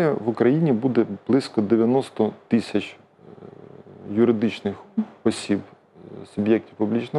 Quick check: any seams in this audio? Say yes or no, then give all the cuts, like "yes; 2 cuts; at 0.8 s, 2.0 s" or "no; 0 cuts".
no; 0 cuts